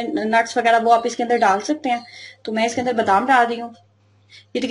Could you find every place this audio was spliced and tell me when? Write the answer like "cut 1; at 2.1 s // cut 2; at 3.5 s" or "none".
none